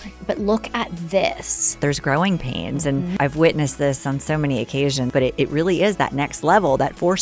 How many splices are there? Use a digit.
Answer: 3